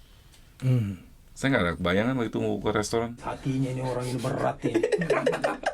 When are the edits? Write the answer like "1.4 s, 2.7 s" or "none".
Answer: 3.3 s